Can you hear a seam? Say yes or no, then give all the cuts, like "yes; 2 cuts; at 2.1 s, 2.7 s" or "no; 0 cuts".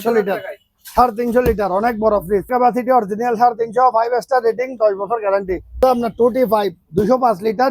yes; 2 cuts; at 2.5 s, 5.8 s